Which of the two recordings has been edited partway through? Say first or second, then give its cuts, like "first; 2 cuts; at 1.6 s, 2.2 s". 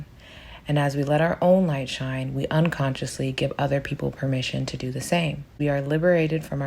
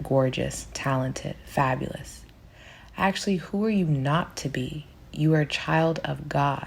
first; 1 cut; at 5.5 s